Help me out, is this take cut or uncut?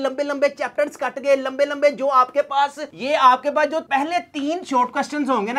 cut